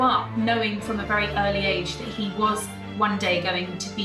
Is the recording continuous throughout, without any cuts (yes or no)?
yes